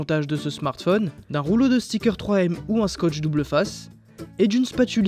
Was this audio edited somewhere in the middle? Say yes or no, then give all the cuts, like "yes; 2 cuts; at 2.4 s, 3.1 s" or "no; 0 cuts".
yes; 1 cut; at 1.2 s